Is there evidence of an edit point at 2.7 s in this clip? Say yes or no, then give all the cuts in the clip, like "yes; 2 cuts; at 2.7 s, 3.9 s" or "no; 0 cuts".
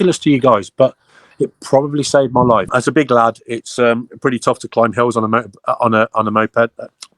yes; 1 cut; at 2.7 s